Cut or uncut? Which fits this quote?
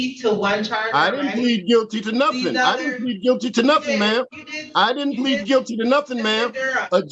uncut